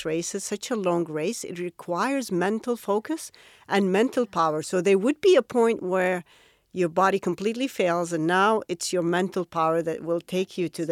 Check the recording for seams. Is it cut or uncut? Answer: uncut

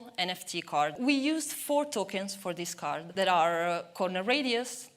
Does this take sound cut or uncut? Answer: cut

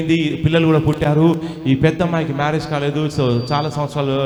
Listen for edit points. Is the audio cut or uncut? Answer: uncut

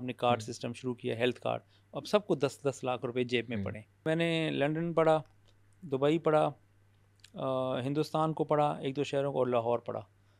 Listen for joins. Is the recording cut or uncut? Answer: cut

